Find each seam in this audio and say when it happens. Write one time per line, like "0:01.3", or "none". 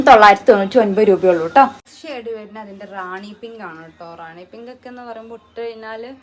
0:01.8